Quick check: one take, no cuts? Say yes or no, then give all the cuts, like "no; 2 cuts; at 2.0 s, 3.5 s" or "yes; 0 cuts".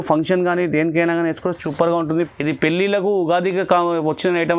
no; 1 cut; at 2.3 s